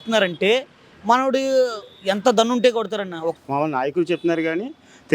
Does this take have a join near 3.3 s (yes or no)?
yes